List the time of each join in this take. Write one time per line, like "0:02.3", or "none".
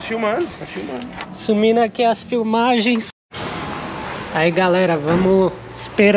0:03.2